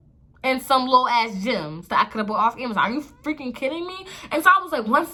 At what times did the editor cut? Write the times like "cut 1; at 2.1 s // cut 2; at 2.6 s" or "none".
none

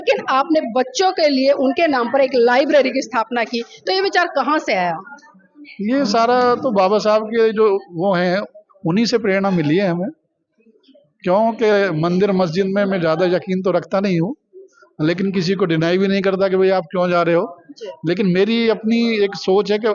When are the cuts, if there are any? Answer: none

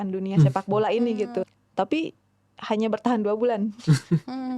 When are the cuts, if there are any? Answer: cut 1; at 1.4 s

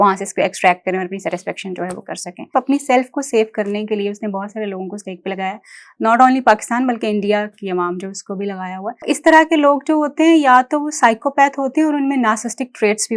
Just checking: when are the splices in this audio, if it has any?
cut 1; at 2.5 s // cut 2; at 9.0 s

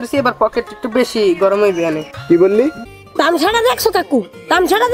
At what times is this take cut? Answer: cut 1; at 3.0 s

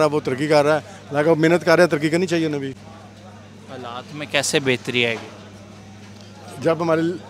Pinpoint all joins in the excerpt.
none

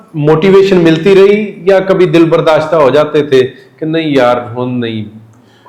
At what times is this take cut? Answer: none

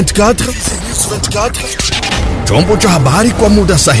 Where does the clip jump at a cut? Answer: cut 1; at 2.4 s

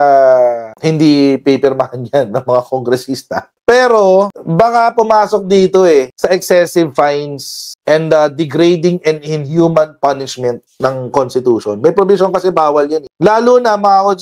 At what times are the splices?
cut 1; at 13.1 s

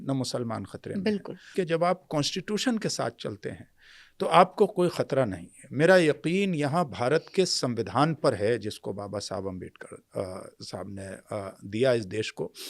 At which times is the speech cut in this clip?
cut 1; at 1.5 s

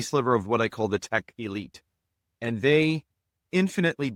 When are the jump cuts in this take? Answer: none

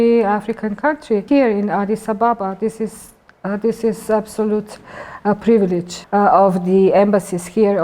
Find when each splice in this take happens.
cut 1; at 1.2 s // cut 2; at 5.9 s

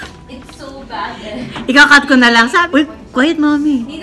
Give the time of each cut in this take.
cut 1; at 2.6 s

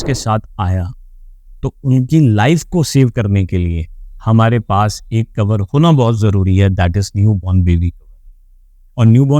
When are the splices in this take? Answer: none

